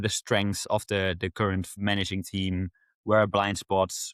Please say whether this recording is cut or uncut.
uncut